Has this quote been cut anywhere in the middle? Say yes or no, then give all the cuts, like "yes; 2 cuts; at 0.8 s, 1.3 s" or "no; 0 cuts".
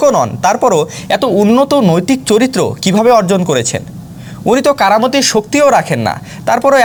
no; 0 cuts